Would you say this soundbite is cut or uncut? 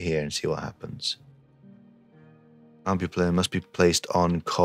cut